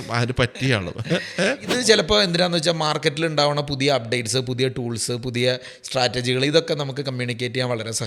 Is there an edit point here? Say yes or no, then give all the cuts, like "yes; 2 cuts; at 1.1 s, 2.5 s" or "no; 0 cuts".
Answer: yes; 1 cut; at 1.8 s